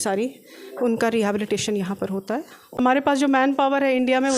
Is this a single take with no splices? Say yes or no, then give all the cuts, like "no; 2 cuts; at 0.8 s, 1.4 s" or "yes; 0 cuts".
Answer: no; 1 cut; at 2.8 s